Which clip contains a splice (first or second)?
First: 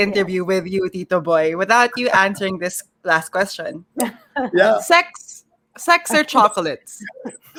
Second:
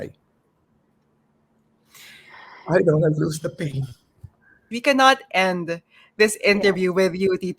second